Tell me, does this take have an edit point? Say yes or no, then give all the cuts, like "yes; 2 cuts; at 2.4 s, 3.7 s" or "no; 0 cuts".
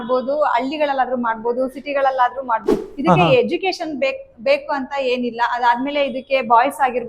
yes; 1 cut; at 2.8 s